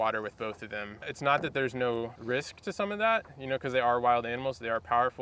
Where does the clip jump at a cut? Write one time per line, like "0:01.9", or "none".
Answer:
0:01.0
0:02.2